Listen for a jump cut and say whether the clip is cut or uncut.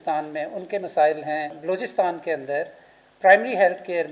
cut